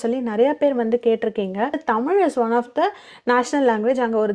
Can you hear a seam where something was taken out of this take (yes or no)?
yes